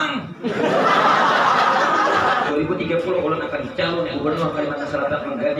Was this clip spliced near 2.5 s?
yes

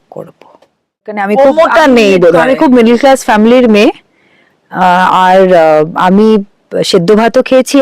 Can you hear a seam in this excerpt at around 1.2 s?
yes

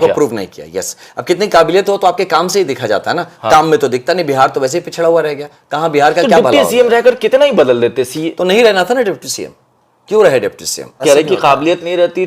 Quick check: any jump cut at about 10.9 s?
yes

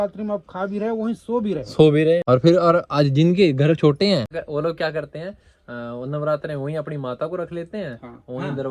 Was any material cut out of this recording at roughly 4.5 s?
no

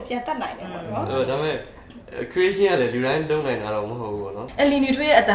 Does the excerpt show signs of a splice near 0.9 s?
no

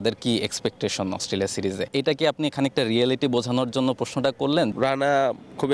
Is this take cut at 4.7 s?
yes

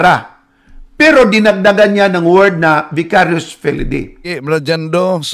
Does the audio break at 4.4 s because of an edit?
yes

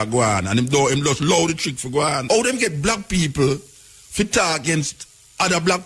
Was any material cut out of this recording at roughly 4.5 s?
no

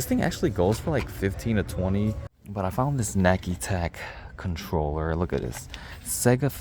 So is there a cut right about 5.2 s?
no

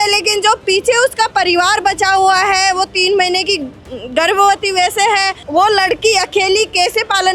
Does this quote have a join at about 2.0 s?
no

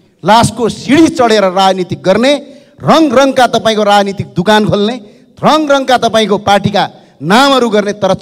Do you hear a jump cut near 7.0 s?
no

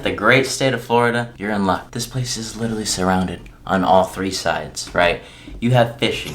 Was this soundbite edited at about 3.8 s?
no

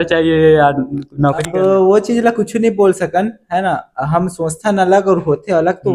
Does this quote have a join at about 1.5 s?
yes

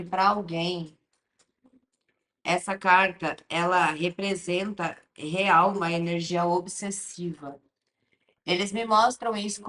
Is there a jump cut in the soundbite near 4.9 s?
no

